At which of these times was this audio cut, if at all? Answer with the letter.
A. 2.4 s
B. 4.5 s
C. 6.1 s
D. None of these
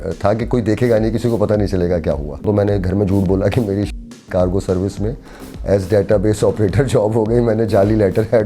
A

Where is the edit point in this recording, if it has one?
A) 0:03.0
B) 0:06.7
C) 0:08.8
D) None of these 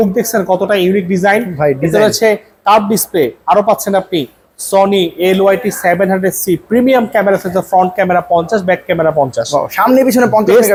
D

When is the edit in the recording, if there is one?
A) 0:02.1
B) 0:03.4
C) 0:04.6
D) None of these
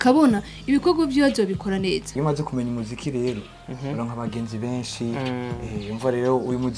A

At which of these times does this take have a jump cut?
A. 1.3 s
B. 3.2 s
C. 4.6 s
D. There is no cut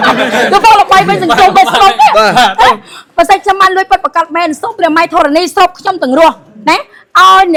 D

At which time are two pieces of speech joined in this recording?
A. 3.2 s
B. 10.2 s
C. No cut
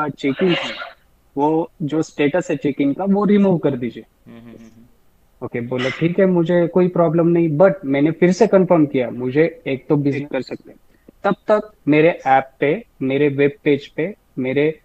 B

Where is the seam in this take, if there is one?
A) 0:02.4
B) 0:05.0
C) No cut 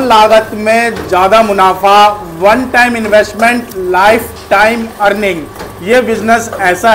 C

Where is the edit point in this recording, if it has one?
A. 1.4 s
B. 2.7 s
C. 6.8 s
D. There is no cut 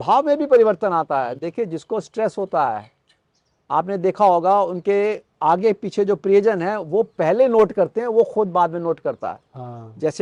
D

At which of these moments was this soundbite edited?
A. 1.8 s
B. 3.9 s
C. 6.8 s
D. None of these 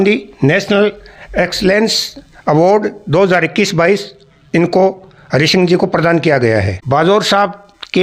C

